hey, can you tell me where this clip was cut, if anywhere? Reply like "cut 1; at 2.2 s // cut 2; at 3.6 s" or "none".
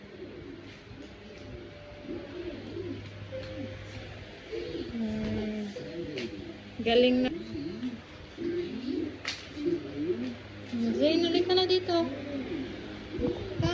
cut 1; at 7.3 s